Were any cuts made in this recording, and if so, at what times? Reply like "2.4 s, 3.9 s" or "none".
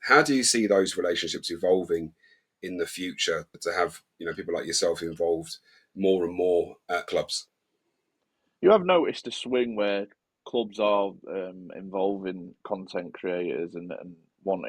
3.6 s, 7.1 s